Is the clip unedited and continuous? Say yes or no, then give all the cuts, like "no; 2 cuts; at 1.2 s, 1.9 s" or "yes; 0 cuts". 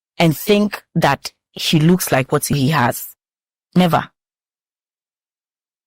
no; 1 cut; at 2.5 s